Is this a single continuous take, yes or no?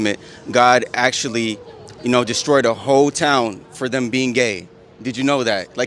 yes